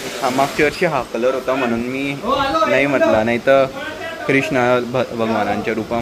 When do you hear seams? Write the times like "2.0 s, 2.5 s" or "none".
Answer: none